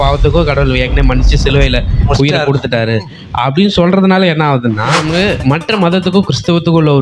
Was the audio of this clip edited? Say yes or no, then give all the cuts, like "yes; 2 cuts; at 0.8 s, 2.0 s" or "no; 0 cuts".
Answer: yes; 1 cut; at 5.0 s